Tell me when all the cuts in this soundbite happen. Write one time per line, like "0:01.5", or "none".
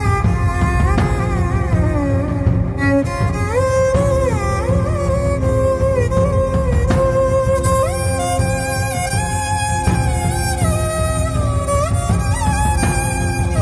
none